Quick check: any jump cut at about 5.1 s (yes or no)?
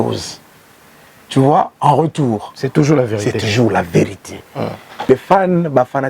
yes